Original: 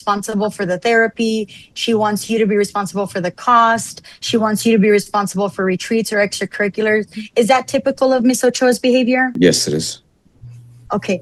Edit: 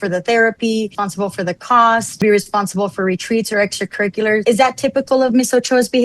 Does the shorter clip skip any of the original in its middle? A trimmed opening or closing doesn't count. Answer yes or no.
yes